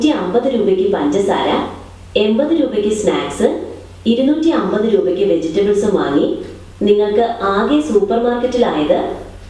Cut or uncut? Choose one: uncut